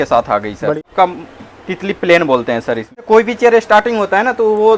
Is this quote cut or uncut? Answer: cut